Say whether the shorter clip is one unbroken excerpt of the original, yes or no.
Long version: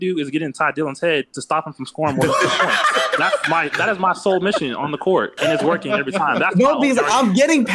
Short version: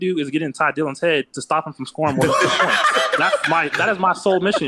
yes